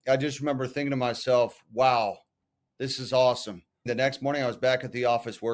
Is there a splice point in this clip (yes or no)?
yes